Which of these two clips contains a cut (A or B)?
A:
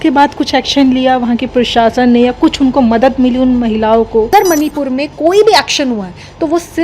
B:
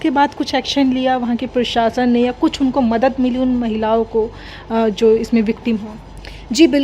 A